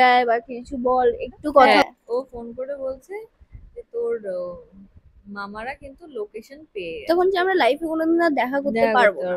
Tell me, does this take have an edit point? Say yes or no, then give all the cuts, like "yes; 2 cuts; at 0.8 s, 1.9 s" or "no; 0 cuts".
yes; 2 cuts; at 1.8 s, 7.0 s